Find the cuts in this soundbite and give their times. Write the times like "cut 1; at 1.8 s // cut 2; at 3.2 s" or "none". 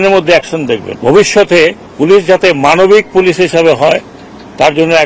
cut 1; at 0.9 s // cut 2; at 1.8 s